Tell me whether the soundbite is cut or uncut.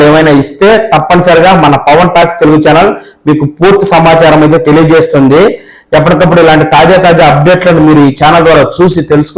uncut